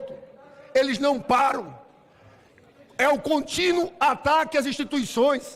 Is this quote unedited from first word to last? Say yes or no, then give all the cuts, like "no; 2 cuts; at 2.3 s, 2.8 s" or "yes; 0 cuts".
yes; 0 cuts